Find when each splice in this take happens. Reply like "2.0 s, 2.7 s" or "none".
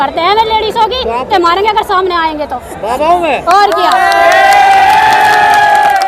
1.3 s

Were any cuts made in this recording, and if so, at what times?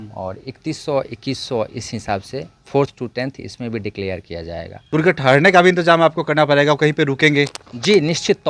4.8 s

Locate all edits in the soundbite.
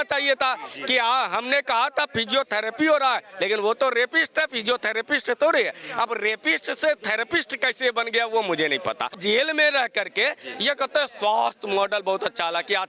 9.2 s

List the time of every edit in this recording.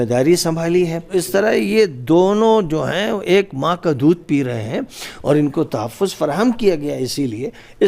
1.1 s

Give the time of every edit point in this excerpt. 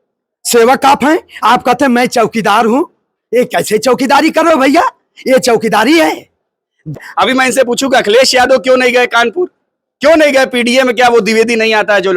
7.0 s

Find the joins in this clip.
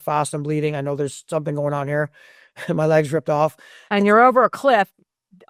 none

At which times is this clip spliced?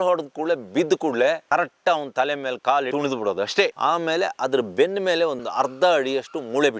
3.7 s

